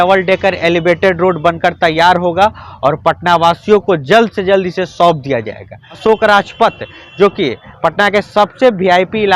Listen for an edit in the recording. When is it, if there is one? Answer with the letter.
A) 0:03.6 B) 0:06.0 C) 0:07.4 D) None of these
B